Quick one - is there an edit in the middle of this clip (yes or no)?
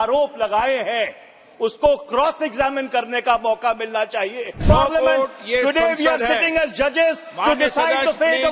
yes